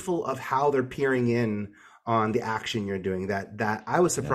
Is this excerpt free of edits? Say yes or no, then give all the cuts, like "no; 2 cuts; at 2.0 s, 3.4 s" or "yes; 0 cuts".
yes; 0 cuts